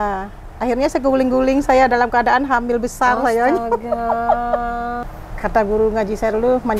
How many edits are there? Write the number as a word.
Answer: one